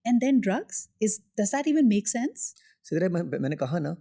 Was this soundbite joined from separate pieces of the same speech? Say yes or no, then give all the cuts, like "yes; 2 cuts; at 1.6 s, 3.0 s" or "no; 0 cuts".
no; 0 cuts